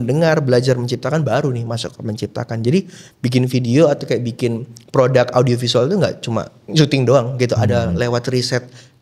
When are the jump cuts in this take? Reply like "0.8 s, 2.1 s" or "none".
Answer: none